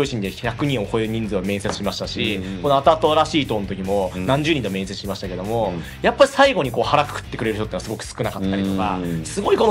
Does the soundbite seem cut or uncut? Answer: uncut